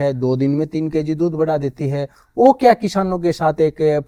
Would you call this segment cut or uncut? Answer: uncut